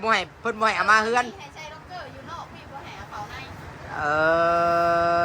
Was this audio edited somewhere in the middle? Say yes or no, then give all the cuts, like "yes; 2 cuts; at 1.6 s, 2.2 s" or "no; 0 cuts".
no; 0 cuts